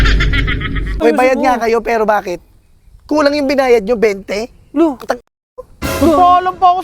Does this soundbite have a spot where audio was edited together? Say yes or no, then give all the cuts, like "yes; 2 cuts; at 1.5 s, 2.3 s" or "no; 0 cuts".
yes; 1 cut; at 0.9 s